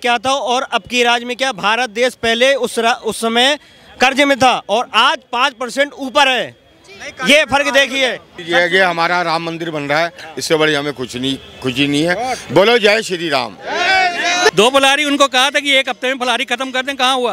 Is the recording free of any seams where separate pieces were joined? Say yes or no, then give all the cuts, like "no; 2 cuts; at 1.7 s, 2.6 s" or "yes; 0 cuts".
no; 2 cuts; at 8.3 s, 14.5 s